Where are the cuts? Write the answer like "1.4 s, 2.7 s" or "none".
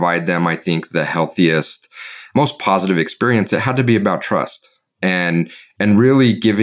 none

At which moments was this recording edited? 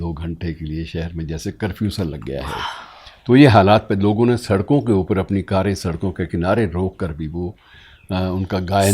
none

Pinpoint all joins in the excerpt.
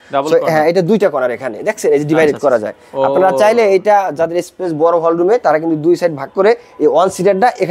none

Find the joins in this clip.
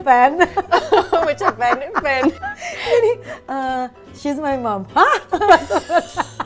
2.5 s

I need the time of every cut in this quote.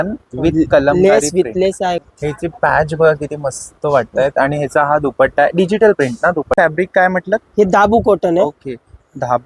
2.1 s, 6.6 s

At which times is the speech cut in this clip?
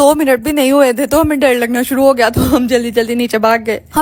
none

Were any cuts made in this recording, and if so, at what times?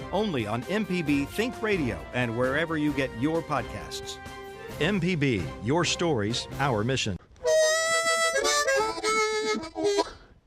7.1 s

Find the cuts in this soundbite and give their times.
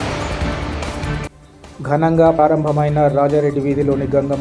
1.1 s

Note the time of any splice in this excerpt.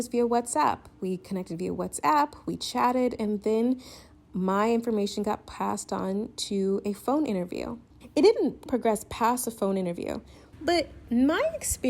7.9 s

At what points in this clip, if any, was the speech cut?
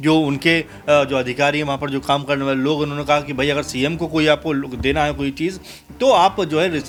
none

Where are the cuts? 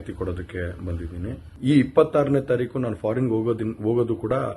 1.0 s

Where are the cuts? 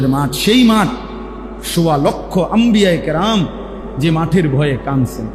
none

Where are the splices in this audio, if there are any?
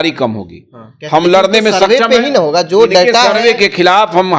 none

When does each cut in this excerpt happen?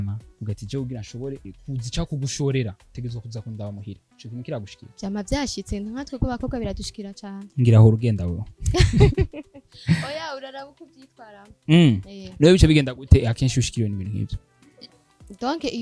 1.6 s, 4.8 s

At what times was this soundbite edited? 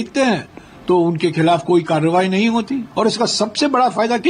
2.9 s

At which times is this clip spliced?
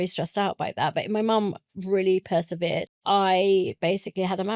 2.9 s

